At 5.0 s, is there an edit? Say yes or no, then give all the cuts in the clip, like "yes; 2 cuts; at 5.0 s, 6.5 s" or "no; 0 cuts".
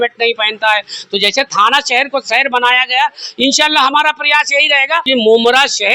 yes; 1 cut; at 5.0 s